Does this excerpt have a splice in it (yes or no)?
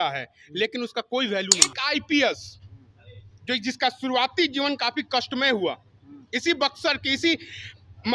yes